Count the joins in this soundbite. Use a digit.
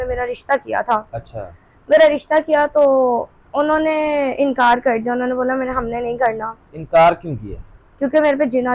0